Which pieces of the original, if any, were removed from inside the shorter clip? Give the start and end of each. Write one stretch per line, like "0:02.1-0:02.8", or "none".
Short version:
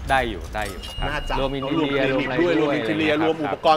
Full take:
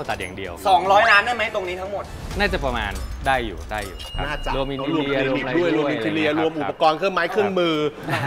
none